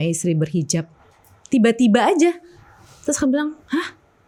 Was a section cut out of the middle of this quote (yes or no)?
no